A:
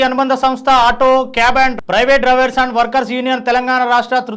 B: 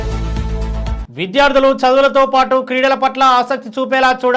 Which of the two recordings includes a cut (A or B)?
B